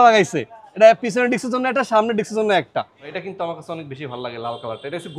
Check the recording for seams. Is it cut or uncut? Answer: cut